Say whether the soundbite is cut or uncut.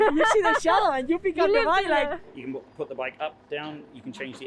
cut